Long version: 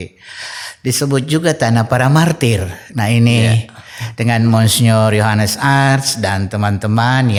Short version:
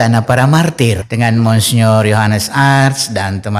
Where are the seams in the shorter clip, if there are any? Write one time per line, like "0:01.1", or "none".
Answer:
0:01.1